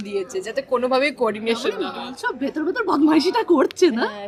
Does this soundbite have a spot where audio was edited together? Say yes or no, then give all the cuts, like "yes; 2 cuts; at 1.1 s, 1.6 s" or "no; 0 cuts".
no; 0 cuts